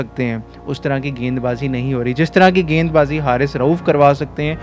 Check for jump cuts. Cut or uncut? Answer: uncut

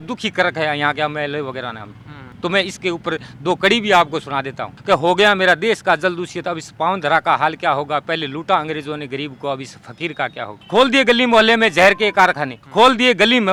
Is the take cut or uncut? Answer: uncut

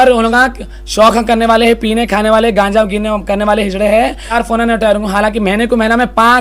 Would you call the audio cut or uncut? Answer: cut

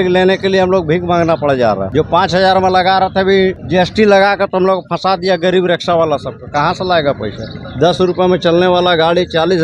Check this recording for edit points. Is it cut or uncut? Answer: cut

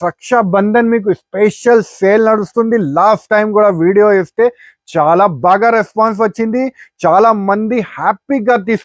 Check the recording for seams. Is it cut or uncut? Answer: uncut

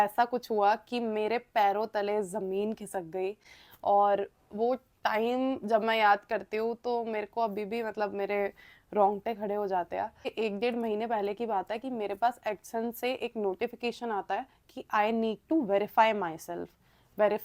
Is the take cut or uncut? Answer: uncut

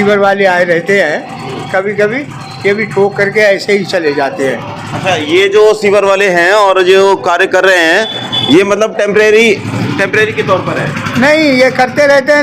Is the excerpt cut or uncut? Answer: uncut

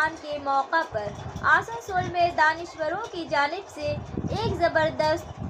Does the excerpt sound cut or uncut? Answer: uncut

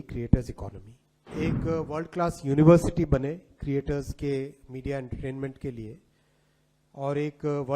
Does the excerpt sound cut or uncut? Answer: cut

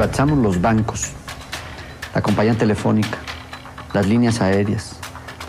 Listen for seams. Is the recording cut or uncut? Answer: uncut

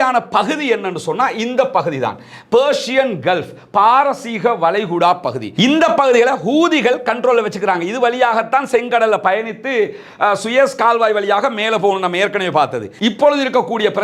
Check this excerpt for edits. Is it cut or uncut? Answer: cut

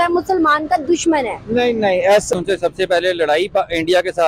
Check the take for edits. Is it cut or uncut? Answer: cut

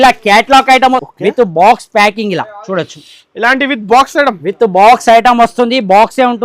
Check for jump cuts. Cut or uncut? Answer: cut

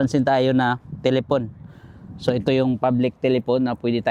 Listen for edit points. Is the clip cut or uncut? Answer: uncut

